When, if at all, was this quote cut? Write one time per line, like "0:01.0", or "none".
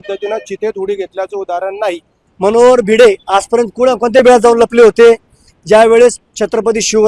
0:02.1